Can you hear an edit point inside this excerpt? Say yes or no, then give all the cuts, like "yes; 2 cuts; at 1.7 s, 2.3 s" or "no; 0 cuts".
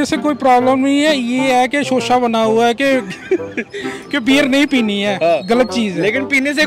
no; 0 cuts